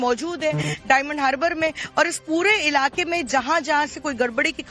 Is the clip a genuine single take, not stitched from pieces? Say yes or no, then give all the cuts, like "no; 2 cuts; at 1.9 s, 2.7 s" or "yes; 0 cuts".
yes; 0 cuts